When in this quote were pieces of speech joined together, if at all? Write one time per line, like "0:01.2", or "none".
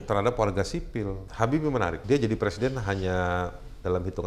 0:01.2
0:02.0